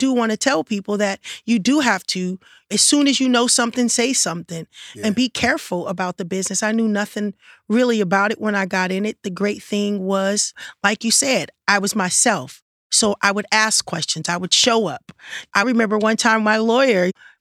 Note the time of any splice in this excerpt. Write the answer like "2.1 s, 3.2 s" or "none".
5.0 s, 15.6 s